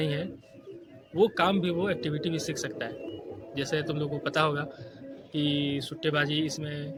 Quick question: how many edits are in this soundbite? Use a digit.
0